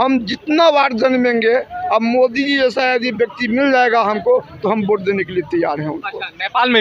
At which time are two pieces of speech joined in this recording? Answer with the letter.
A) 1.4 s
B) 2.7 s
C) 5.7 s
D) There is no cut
D